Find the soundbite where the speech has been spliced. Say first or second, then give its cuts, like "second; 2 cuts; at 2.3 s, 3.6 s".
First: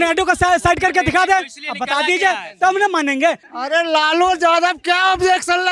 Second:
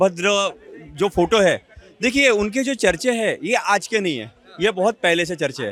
first; 1 cut; at 3.5 s